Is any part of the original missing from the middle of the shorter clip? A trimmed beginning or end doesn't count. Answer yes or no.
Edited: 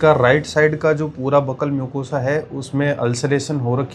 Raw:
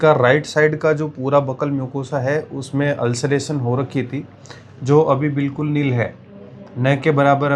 no